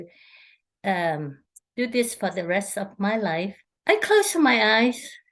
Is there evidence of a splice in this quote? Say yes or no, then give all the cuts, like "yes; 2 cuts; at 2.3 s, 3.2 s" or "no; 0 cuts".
yes; 1 cut; at 3.6 s